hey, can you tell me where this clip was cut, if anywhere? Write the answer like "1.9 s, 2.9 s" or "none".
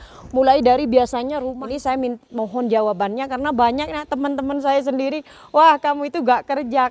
1.5 s

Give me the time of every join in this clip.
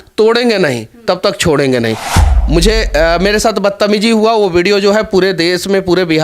2.0 s

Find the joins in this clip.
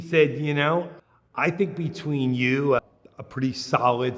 1.0 s, 2.8 s

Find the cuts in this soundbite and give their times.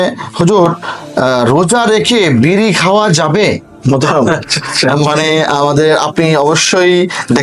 3.7 s

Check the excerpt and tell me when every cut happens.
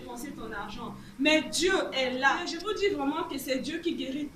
2.5 s

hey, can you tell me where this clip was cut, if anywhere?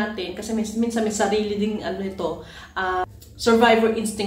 3.0 s

